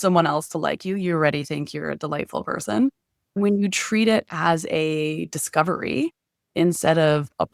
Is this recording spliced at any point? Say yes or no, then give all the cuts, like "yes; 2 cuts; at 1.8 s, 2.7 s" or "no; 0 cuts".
yes; 1 cut; at 3.4 s